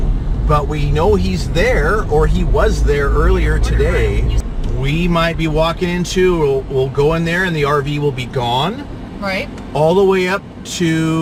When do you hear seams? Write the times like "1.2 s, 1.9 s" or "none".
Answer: none